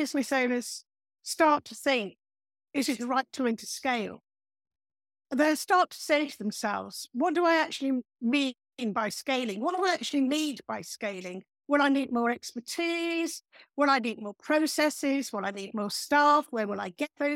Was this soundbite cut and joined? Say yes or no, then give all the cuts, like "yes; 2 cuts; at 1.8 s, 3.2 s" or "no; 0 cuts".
no; 0 cuts